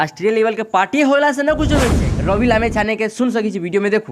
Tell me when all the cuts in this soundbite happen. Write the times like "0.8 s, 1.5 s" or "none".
2.0 s